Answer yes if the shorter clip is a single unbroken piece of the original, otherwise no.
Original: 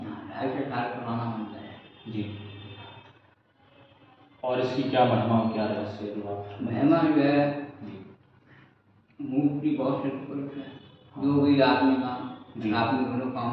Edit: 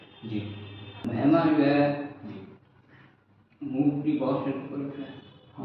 no